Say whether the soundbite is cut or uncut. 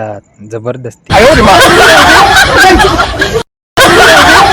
cut